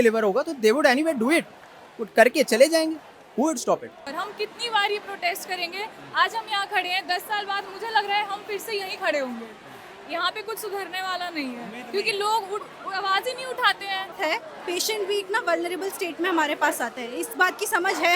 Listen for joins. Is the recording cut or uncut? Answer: cut